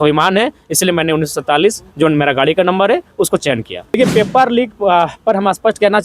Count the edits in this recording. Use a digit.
1